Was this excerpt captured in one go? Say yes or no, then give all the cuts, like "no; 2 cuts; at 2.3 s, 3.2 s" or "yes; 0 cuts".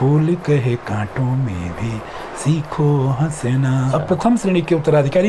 no; 1 cut; at 3.9 s